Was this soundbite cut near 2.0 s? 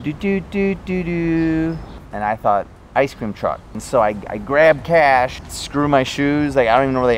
yes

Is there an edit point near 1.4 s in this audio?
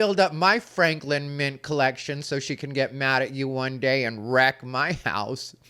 no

